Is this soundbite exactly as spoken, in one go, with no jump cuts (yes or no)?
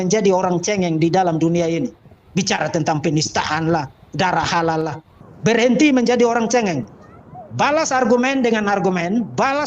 no